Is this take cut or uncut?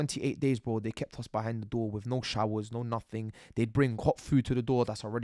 uncut